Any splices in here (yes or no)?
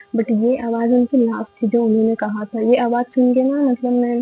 no